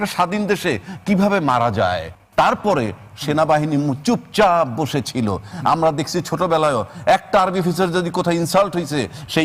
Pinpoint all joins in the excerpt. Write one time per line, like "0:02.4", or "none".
0:02.1